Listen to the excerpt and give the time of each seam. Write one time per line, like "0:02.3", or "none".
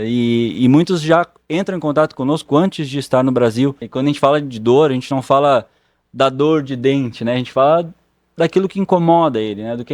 0:03.9